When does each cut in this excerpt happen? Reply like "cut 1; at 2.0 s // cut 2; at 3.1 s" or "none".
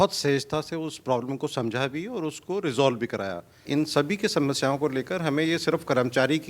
cut 1; at 3.6 s